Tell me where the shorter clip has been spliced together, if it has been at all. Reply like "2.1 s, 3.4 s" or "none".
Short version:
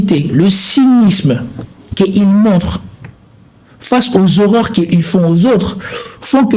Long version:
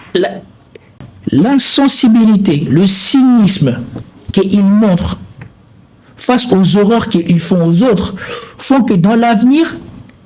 none